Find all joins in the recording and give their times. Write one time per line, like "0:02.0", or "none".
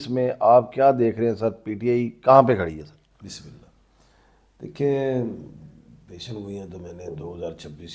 none

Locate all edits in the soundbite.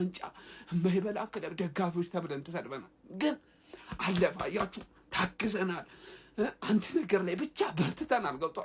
none

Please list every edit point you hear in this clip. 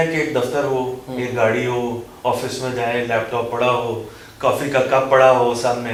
none

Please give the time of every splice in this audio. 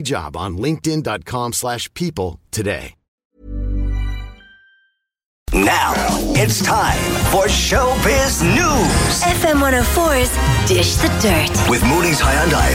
0:05.4

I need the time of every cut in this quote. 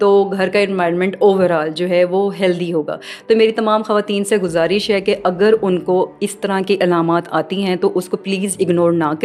none

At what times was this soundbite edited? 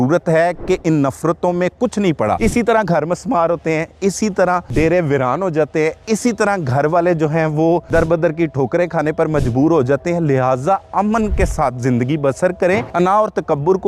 0:02.4
0:04.7
0:07.8
0:12.9

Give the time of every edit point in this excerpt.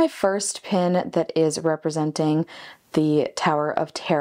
none

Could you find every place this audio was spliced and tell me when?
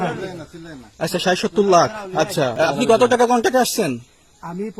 0:02.5

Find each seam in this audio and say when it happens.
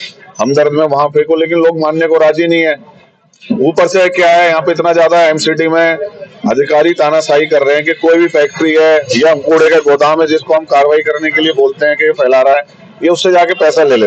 none

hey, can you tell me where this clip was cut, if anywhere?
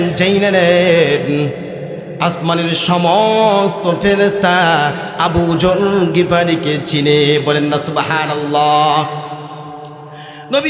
none

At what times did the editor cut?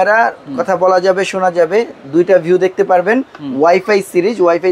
none

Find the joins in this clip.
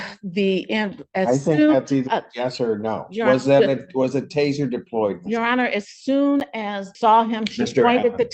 0:06.9

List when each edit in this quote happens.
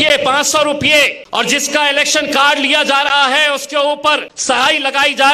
0:01.2
0:04.3

